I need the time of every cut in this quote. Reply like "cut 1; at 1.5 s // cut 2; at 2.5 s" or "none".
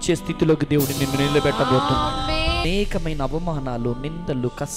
cut 1; at 2.6 s

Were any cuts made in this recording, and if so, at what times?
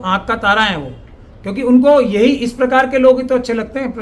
none

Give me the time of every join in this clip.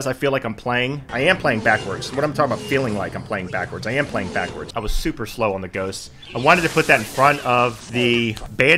cut 1; at 1.1 s // cut 2; at 4.6 s

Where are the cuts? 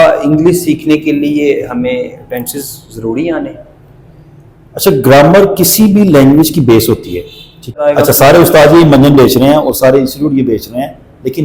cut 1; at 7.8 s

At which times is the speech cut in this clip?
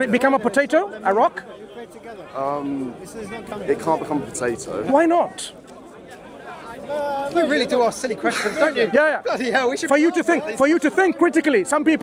none

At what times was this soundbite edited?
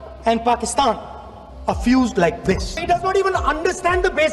cut 1; at 2.8 s

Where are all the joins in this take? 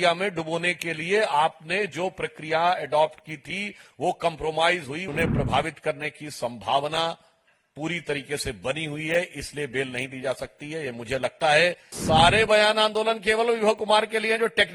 cut 1; at 5.1 s // cut 2; at 11.9 s

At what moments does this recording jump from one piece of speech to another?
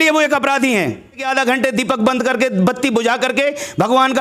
cut 1; at 1.2 s

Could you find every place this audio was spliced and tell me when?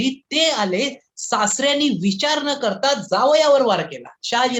none

